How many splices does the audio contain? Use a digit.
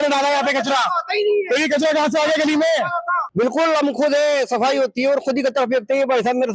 1